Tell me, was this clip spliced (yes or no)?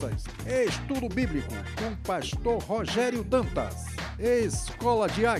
no